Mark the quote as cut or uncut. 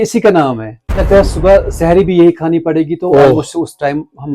cut